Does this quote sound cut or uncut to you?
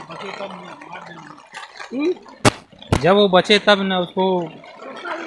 uncut